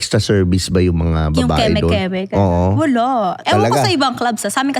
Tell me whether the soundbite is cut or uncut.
cut